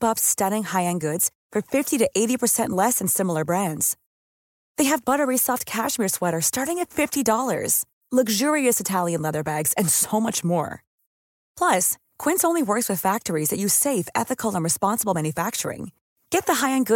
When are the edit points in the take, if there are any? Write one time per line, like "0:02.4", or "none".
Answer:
none